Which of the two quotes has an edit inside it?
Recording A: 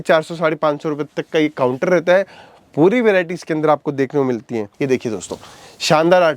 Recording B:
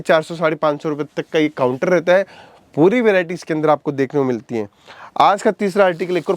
A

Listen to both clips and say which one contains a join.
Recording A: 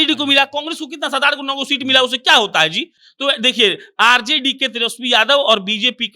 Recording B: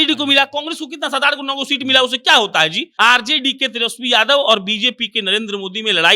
B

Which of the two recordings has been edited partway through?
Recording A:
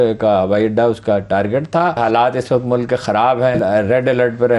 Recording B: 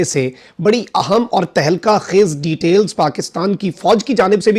A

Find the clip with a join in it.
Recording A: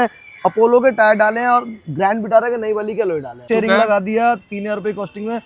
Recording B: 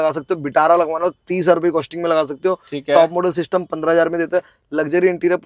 A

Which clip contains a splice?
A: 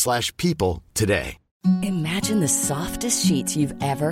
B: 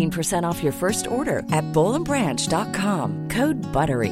A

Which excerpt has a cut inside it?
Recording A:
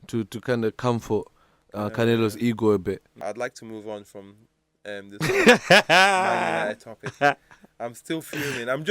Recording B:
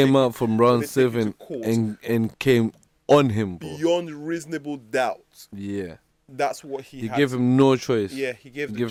A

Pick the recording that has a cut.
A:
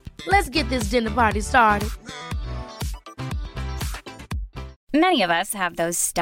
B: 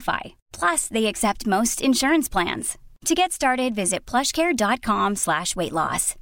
A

